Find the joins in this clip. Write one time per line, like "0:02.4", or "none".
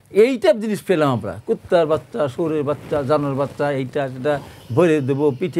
none